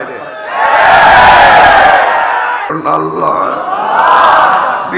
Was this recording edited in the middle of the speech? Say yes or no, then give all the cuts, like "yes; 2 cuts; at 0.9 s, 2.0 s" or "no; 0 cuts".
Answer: yes; 1 cut; at 2.7 s